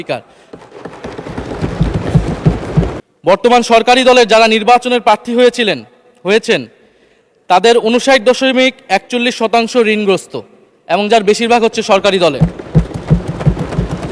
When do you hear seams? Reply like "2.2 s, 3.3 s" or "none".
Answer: 3.0 s